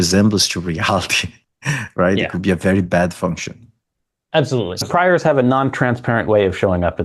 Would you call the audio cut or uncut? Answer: cut